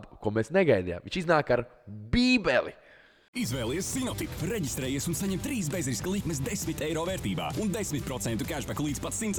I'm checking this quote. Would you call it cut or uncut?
uncut